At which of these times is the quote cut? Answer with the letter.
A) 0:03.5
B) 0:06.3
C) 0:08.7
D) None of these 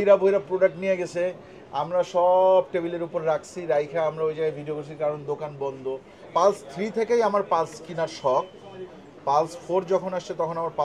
B